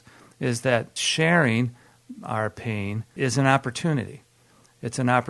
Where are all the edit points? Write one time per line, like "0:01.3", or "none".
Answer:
0:01.0
0:03.1